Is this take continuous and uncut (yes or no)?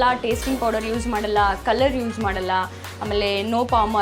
yes